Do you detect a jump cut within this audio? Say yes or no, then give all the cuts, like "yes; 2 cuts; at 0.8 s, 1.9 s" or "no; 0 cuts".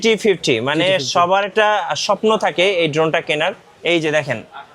yes; 1 cut; at 3.7 s